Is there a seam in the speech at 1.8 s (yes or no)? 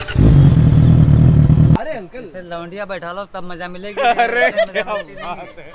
yes